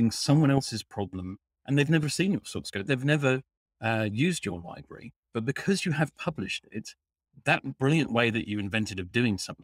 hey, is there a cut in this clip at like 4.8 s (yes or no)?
no